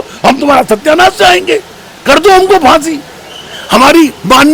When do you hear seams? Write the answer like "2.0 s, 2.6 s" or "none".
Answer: none